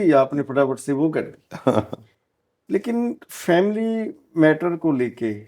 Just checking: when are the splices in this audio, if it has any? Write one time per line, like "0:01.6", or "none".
none